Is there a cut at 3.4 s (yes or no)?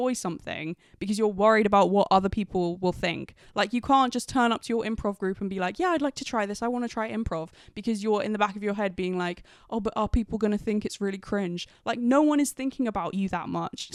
no